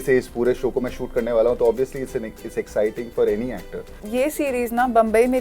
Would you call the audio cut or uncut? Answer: cut